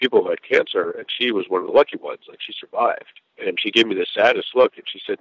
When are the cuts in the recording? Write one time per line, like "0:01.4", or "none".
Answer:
0:03.3